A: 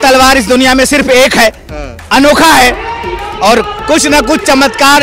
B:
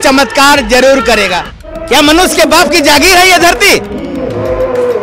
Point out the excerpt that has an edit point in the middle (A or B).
B